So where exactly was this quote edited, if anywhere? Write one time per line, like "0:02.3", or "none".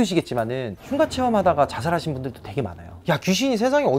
0:03.0